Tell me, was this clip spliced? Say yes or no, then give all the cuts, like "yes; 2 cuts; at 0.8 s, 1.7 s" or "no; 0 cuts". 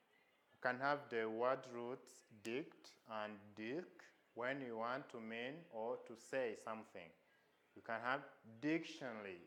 no; 0 cuts